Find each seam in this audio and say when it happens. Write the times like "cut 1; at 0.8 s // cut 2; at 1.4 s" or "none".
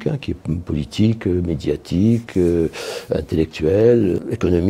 none